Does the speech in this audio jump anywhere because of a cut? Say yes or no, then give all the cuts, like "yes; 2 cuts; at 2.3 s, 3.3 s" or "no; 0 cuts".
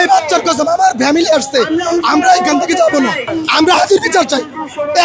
yes; 1 cut; at 3.3 s